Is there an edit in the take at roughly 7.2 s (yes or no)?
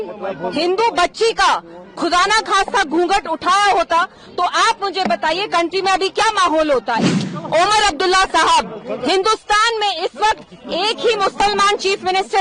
yes